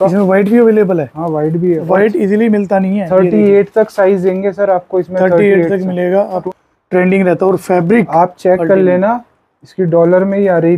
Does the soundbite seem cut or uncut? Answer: cut